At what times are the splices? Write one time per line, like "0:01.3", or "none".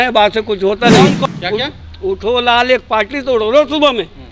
0:01.3